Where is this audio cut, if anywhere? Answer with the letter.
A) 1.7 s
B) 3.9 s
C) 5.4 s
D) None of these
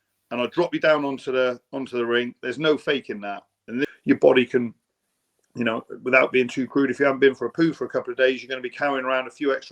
B